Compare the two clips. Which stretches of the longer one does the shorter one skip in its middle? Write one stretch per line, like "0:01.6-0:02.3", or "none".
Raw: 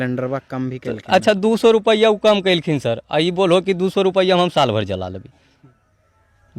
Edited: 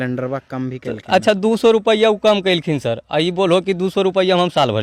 none